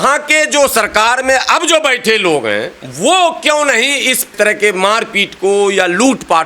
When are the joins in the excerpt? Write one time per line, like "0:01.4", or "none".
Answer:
0:04.3

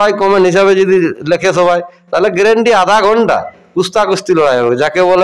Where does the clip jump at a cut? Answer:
none

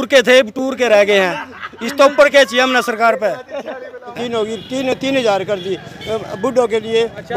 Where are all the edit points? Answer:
0:04.1

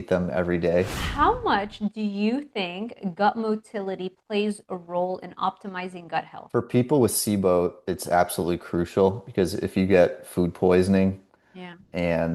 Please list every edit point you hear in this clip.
0:01.0
0:06.4

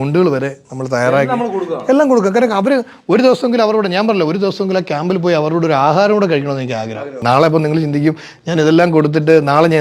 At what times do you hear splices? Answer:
0:07.2

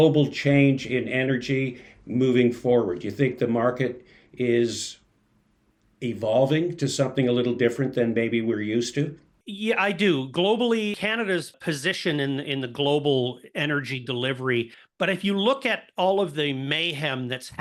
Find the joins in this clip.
none

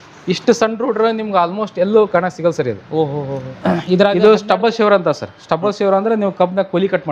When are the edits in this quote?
0:04.2

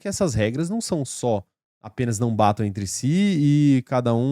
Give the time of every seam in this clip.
none

